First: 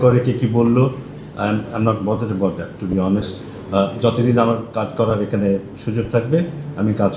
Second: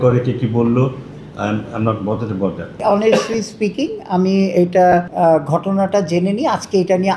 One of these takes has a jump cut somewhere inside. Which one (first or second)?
second